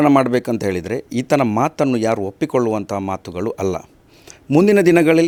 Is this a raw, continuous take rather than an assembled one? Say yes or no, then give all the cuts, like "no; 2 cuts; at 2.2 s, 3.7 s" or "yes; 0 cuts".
yes; 0 cuts